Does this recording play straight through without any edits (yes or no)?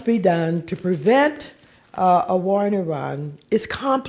yes